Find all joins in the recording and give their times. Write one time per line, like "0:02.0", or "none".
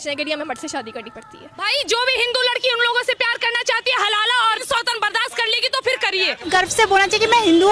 0:01.7
0:04.6
0:06.4